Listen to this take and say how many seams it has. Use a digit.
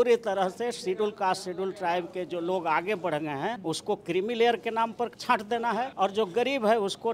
2